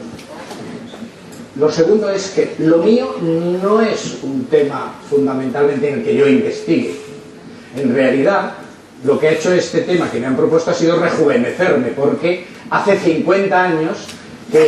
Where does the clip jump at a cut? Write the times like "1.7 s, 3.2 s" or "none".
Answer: 1.1 s